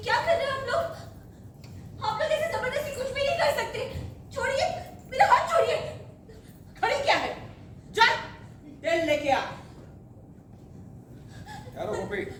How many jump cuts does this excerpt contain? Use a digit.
0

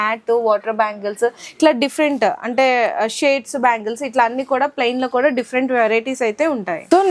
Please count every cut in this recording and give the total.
0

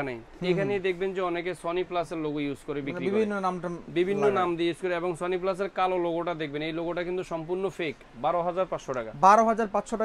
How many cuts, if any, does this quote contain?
1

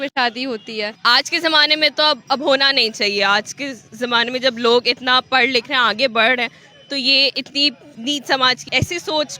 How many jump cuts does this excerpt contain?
3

